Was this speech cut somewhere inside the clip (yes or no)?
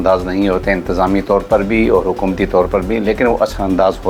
no